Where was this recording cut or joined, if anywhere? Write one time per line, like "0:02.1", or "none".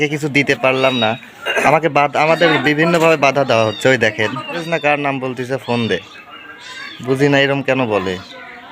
0:04.5